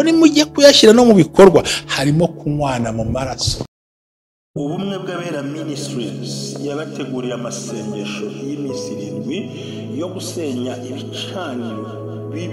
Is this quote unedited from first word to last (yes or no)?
no